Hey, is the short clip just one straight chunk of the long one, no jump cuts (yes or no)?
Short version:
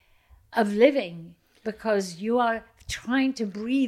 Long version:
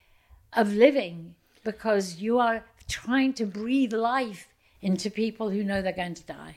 yes